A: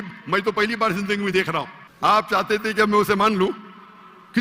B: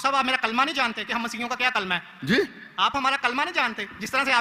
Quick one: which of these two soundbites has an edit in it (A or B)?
A